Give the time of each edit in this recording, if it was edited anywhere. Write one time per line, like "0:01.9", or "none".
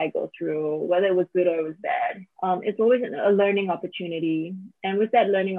0:02.3